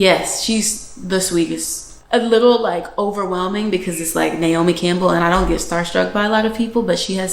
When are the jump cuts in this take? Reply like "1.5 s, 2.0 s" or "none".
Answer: 1.9 s